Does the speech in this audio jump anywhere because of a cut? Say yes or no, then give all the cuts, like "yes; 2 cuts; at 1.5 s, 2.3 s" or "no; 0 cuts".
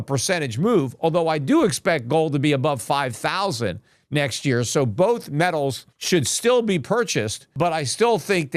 yes; 2 cuts; at 5.9 s, 7.5 s